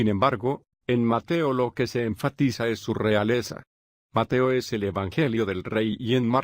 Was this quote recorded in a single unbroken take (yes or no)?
no